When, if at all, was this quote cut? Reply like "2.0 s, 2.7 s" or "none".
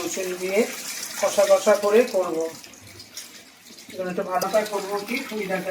4.4 s